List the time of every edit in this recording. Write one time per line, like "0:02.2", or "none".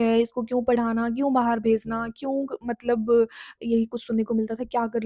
0:03.6

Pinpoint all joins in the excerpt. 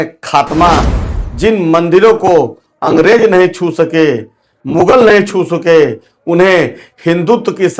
0:01.0

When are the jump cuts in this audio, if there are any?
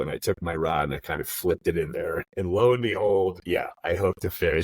0:02.3
0:03.4

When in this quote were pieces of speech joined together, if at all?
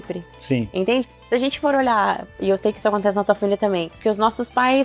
0:03.9

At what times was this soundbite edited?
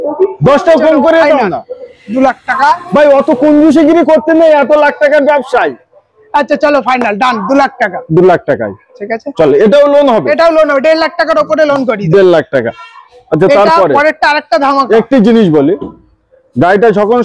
none

